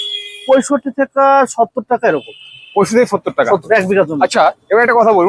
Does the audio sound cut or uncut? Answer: uncut